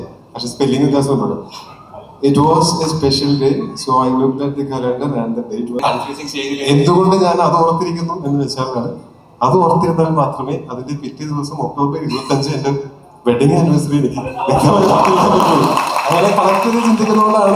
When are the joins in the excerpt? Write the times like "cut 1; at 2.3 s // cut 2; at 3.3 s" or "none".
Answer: cut 1; at 5.8 s